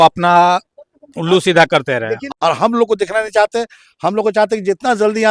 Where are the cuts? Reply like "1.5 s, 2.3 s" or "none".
2.3 s